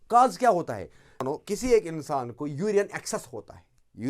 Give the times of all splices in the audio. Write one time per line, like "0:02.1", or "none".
0:01.3